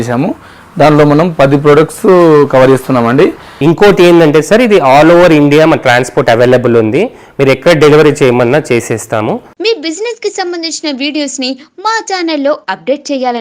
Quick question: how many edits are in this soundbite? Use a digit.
2